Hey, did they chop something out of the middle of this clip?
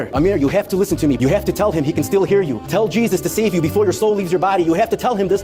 yes; 1 cut; at 1.2 s

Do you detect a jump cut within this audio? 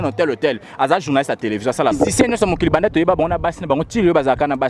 yes; 1 cut; at 2.0 s

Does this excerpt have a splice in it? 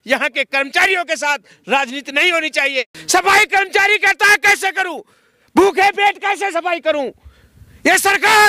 yes; 1 cut; at 2.9 s

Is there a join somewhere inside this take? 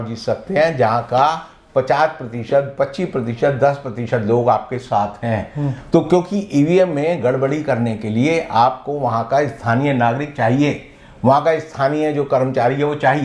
no; 0 cuts

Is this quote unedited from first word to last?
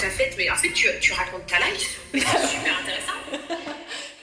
yes; 0 cuts

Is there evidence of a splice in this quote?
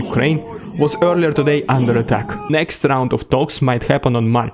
yes; 1 cut; at 2.5 s

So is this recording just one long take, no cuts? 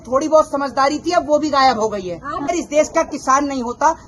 no; 1 cut; at 2.5 s

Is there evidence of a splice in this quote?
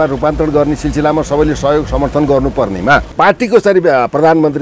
yes; 1 cut; at 3.1 s

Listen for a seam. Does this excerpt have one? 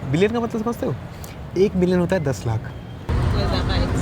yes; 1 cut; at 3.1 s

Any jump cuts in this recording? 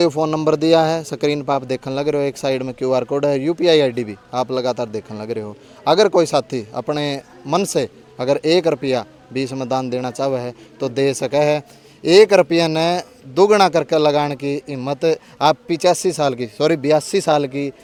no; 0 cuts

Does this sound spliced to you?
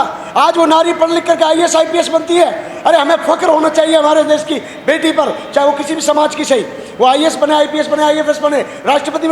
no; 0 cuts

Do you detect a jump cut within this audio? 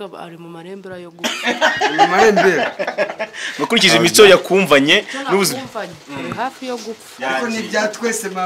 no; 0 cuts

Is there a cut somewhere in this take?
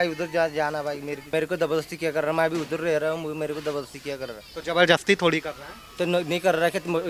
yes; 1 cut; at 1.3 s

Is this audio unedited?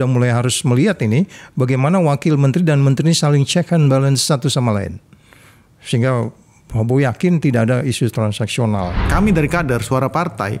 no; 1 cut; at 9.0 s

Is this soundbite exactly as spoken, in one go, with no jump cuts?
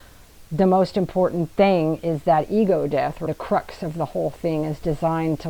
no; 1 cut; at 3.2 s

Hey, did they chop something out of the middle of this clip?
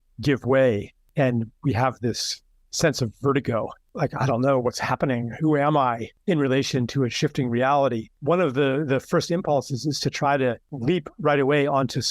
yes; 5 cuts; at 1.0 s, 3.8 s, 6.1 s, 8.1 s, 10.7 s

